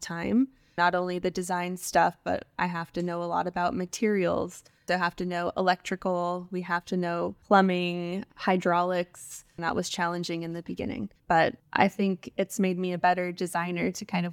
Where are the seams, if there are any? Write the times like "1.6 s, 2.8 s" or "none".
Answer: 7.4 s, 11.4 s